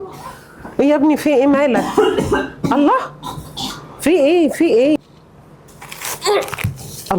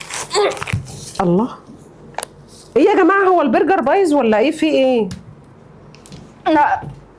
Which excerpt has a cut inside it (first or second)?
first